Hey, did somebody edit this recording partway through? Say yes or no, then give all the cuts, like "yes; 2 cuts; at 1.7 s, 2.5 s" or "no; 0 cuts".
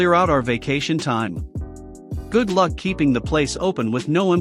no; 0 cuts